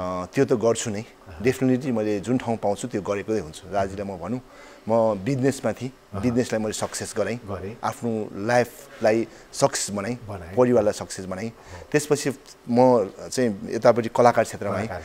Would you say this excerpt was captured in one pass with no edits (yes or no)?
yes